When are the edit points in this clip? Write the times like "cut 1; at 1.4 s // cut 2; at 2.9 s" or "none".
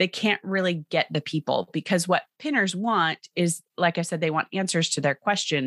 none